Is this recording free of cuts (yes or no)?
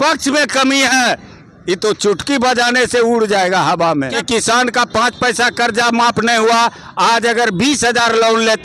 no